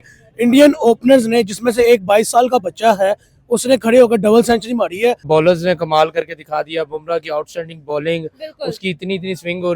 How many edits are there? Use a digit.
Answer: 1